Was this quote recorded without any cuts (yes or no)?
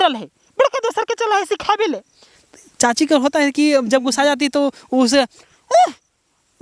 yes